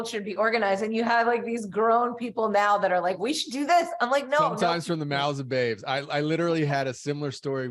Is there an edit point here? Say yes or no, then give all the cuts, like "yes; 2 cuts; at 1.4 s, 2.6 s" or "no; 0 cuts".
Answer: no; 0 cuts